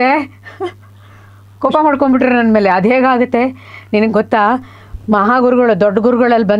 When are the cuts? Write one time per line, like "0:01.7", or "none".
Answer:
none